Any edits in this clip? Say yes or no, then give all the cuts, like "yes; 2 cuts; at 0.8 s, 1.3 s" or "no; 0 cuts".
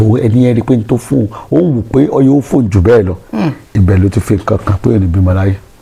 no; 0 cuts